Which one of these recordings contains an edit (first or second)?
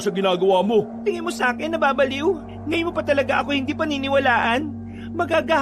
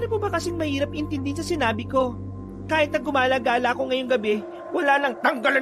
first